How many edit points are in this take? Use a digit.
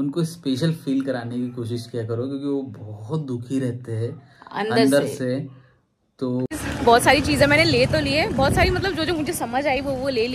1